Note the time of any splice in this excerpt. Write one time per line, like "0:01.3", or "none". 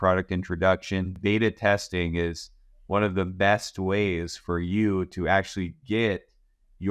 0:01.1

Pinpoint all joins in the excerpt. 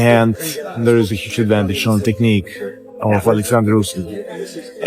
none

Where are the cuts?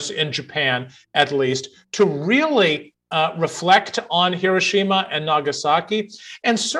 none

